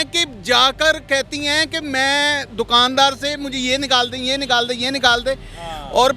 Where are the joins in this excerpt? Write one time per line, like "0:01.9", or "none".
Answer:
none

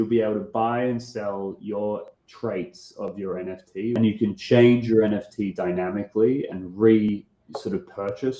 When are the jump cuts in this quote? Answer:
0:03.9

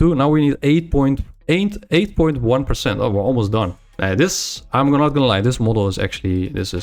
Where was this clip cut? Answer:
0:01.3
0:03.8

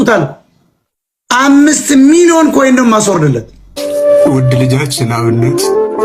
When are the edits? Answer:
0:03.8

